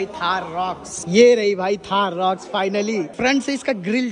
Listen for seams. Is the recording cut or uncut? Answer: cut